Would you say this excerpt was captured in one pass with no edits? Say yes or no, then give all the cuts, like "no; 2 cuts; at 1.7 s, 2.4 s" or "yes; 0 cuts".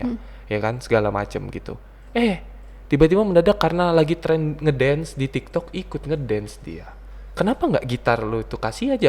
yes; 0 cuts